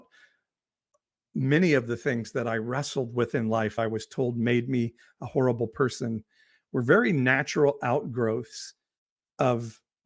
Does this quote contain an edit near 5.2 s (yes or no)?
no